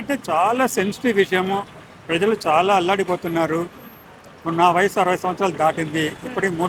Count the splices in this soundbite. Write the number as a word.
zero